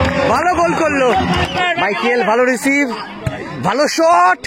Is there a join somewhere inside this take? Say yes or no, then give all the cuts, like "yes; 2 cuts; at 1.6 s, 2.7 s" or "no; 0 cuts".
yes; 1 cut; at 1.6 s